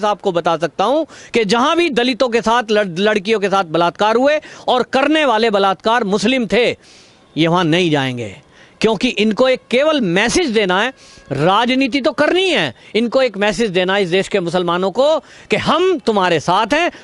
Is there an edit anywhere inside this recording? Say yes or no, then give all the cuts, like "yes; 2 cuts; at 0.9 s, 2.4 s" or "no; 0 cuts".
no; 0 cuts